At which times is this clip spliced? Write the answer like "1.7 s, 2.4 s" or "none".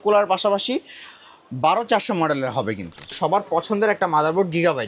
3.2 s